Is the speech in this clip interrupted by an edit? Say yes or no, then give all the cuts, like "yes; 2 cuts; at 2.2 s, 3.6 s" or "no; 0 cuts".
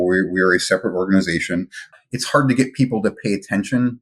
yes; 1 cut; at 1.9 s